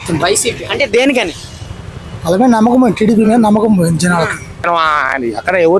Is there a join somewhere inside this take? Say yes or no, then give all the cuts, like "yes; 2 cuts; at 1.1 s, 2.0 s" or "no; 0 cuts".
yes; 1 cut; at 4.5 s